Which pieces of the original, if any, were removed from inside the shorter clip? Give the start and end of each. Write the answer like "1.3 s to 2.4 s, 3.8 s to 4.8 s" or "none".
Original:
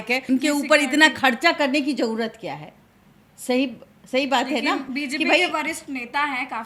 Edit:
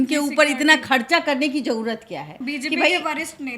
2.7 s to 4.9 s